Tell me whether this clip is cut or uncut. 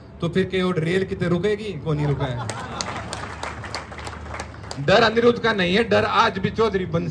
uncut